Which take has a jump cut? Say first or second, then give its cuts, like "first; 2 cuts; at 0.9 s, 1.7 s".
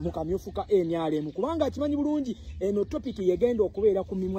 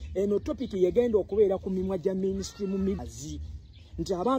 second; 1 cut; at 3.0 s